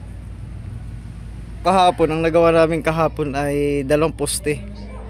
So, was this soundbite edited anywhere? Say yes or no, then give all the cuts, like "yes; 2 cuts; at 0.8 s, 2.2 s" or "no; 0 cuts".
yes; 1 cut; at 1.6 s